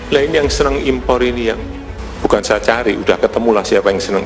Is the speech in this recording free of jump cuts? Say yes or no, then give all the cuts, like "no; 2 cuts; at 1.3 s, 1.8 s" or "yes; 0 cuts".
yes; 0 cuts